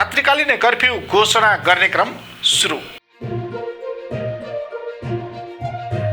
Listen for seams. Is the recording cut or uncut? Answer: cut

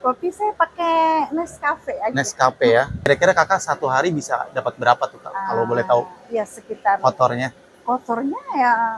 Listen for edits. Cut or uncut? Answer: cut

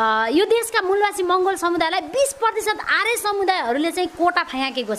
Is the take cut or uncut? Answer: uncut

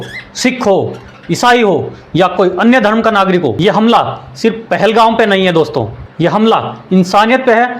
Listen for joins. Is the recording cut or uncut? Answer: cut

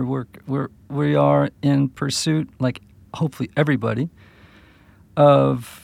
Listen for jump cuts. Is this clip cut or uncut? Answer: uncut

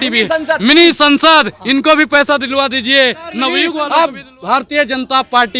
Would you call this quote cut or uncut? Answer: cut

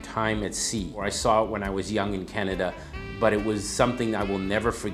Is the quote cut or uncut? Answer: cut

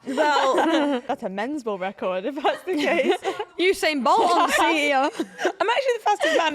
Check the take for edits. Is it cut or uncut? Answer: cut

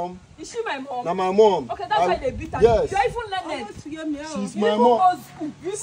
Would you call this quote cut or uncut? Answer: uncut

